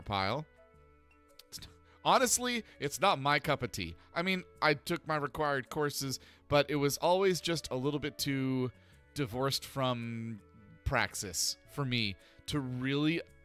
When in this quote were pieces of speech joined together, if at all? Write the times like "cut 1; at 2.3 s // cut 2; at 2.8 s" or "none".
none